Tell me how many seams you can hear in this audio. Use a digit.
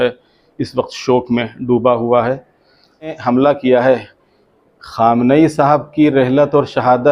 1